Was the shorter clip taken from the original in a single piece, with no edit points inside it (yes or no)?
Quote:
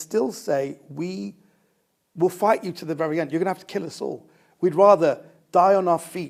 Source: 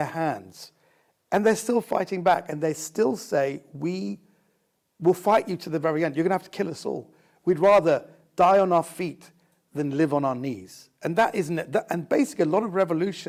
yes